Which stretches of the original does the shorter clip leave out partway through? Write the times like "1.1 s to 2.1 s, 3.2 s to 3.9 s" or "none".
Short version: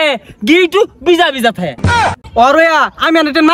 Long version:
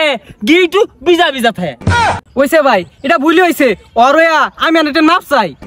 2.2 s to 3.7 s

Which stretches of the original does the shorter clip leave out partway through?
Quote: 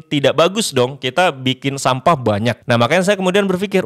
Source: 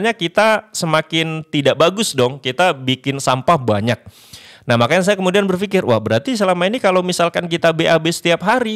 4.0 s to 4.6 s

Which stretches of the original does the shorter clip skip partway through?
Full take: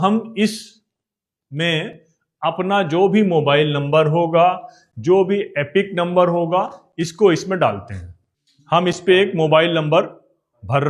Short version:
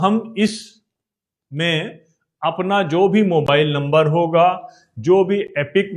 none

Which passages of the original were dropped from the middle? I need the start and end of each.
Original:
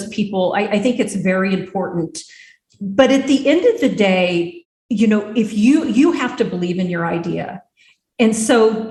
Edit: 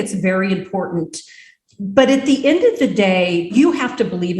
4.5 s to 5.9 s

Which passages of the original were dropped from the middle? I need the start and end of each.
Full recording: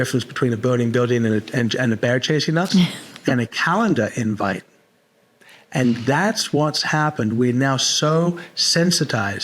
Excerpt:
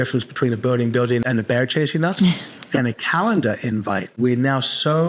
1.2 s to 1.8 s, 4.7 s to 7.3 s

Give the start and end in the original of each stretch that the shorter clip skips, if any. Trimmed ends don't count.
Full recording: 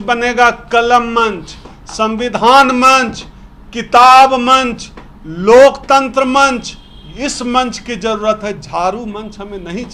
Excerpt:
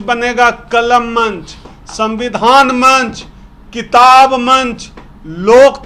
none

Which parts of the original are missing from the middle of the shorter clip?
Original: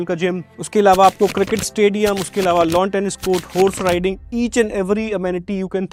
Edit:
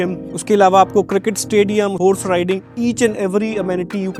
2.2 s to 3.5 s

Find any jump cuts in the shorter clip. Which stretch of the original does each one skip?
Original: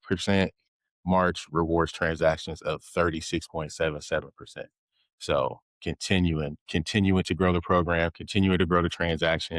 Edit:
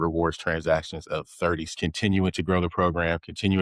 3.2 s to 6.6 s

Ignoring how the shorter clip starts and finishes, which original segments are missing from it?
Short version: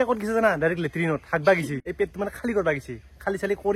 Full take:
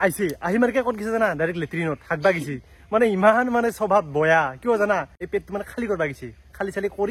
2.6 s to 5.2 s

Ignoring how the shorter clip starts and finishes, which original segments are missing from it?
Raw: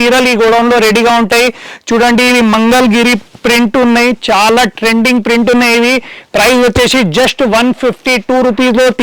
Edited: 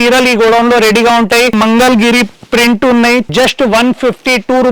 1.5 s to 2.5 s, 4.2 s to 7.1 s

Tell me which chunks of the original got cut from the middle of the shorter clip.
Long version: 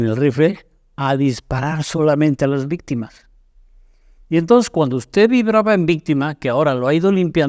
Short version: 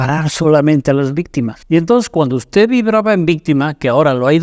3.1 s to 4.2 s

